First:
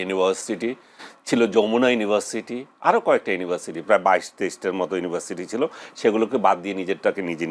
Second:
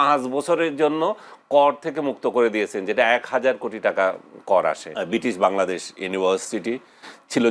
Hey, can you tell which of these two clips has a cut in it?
second; 1 cut; at 4.9 s

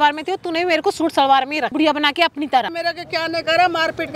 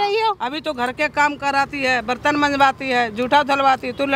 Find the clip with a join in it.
first; 2 cuts; at 1.7 s, 2.7 s

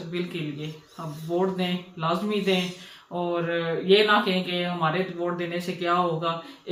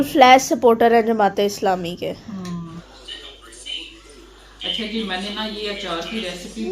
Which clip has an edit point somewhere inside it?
second; 1 cut; at 2.7 s

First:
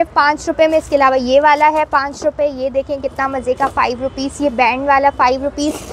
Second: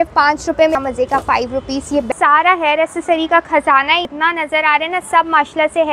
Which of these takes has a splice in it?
second; 3 cuts; at 0.7 s, 2.1 s, 4.0 s

